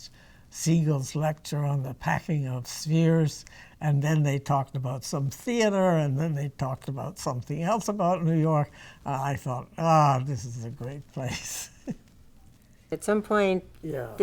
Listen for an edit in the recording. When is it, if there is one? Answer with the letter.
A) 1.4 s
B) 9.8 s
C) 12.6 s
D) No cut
D